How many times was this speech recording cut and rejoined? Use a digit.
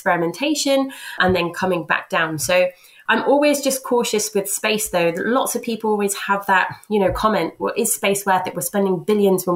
1